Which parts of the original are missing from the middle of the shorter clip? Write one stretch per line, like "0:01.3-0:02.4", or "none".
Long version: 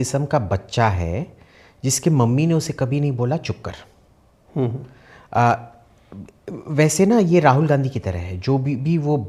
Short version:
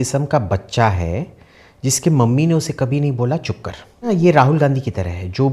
0:04.1-0:07.2